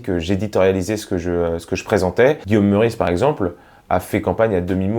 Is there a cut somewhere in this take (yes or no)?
yes